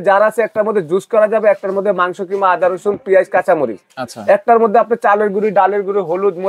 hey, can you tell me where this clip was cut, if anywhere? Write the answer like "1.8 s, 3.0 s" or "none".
none